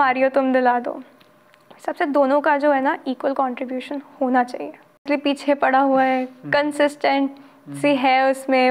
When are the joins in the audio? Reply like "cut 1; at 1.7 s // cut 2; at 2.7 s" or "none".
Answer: cut 1; at 5.1 s